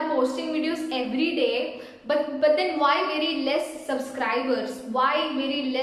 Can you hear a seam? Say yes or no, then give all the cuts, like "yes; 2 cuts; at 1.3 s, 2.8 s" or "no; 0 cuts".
no; 0 cuts